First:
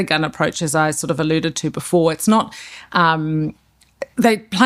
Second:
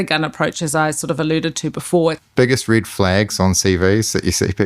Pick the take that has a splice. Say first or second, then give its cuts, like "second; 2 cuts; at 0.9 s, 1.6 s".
second; 1 cut; at 2.2 s